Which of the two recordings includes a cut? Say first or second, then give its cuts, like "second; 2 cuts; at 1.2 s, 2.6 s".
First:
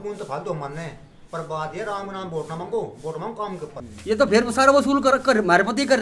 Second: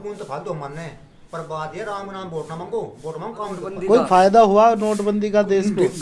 first; 1 cut; at 3.7 s